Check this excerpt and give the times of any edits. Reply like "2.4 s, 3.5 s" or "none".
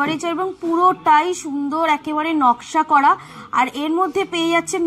none